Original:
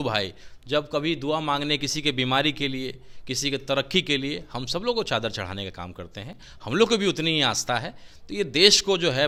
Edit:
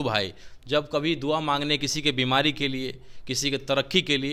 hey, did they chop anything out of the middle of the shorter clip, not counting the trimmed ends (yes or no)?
no